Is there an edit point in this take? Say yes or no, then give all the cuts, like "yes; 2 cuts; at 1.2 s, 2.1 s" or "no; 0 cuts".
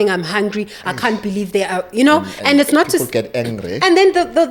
no; 0 cuts